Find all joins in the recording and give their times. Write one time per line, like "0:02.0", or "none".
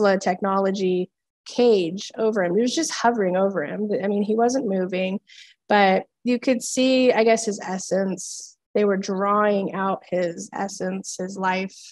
none